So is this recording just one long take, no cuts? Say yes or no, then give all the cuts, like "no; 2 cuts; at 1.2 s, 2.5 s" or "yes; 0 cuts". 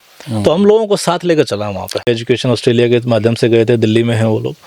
no; 1 cut; at 2.1 s